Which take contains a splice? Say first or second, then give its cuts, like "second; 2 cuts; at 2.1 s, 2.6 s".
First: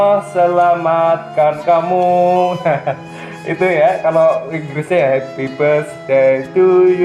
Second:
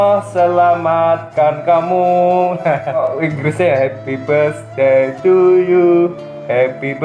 second; 1 cut; at 3.0 s